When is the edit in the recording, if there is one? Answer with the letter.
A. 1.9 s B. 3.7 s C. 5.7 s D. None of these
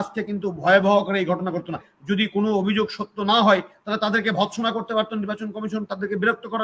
A